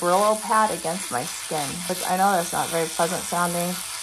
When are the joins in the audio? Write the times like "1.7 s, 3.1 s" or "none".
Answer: 1.8 s